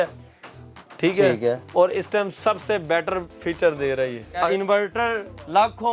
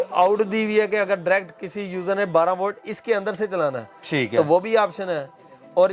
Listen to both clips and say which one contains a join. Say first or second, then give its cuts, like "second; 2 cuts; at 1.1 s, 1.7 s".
first; 1 cut; at 4.5 s